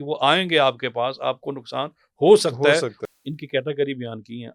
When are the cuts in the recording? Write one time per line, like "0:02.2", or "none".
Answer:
0:03.0